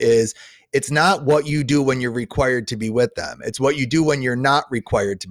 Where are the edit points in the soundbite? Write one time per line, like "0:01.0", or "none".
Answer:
none